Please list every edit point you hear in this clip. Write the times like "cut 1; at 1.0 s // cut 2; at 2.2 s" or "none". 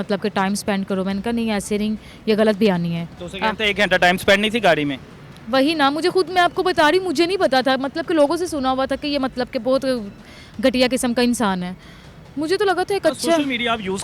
none

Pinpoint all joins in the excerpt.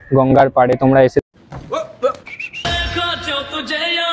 none

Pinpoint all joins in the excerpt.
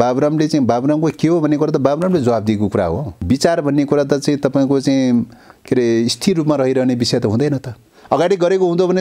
cut 1; at 3.1 s // cut 2; at 7.9 s

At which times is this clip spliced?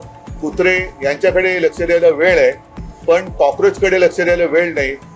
none

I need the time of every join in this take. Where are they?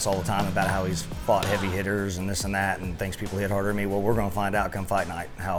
none

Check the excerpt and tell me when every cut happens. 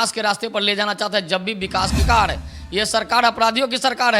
cut 1; at 2.0 s

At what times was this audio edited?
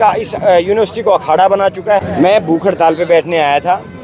cut 1; at 2.0 s

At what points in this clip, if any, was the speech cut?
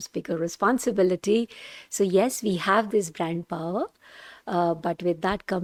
none

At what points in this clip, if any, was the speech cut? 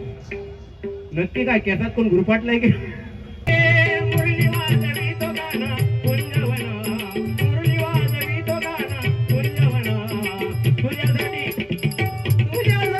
cut 1; at 3.5 s

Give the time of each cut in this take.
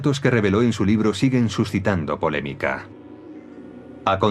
cut 1; at 2.6 s

